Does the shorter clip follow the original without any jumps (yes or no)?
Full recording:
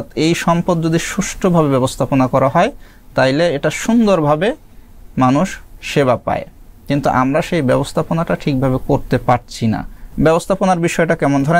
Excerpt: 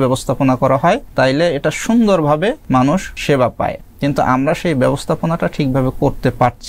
no